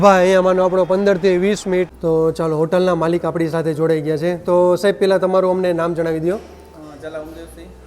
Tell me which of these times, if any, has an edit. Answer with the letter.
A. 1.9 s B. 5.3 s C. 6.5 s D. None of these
A